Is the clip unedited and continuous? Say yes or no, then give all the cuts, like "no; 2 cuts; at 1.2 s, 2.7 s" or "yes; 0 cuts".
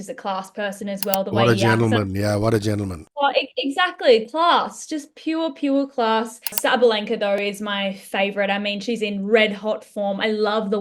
no; 1 cut; at 6.6 s